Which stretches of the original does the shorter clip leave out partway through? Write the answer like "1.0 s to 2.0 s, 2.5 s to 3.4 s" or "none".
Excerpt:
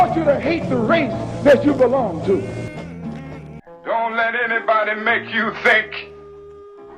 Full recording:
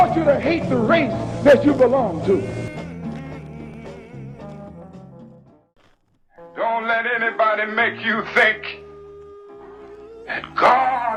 3.6 s to 6.3 s